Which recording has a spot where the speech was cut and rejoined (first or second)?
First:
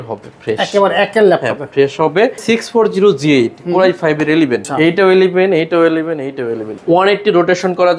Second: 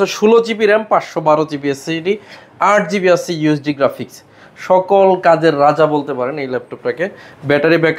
first